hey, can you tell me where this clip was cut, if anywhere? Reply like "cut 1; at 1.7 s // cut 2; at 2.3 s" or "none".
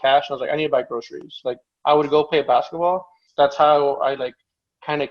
cut 1; at 3.2 s